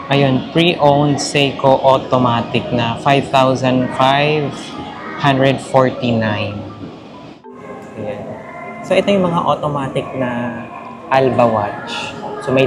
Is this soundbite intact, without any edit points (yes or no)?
no